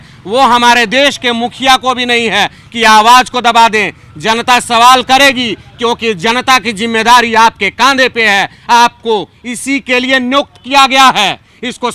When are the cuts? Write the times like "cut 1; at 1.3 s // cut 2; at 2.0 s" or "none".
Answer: none